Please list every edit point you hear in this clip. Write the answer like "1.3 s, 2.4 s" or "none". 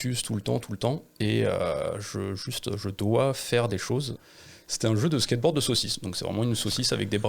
4.2 s